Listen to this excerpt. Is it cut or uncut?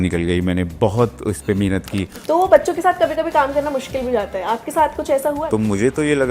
cut